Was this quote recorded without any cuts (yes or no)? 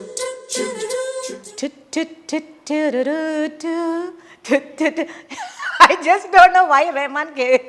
no